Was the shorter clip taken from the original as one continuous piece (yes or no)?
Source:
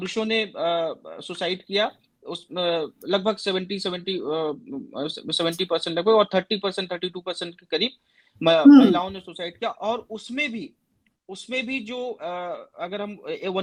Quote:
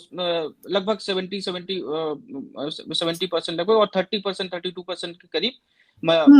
yes